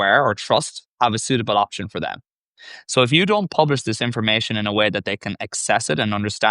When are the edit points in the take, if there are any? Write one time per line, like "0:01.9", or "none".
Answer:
none